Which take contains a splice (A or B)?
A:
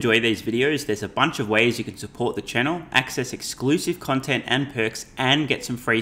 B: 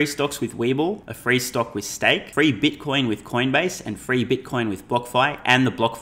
B